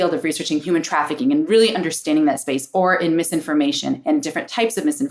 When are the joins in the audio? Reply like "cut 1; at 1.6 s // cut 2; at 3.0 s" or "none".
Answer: none